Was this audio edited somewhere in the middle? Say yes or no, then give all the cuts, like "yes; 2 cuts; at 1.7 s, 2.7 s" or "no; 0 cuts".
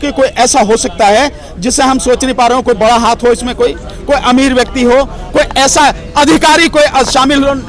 no; 0 cuts